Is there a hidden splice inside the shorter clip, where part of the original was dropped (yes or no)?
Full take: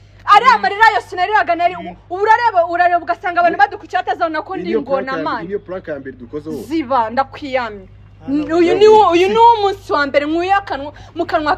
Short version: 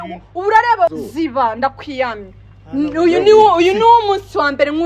yes